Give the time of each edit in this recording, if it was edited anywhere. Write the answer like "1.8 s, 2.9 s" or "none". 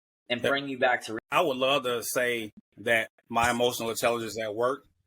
1.1 s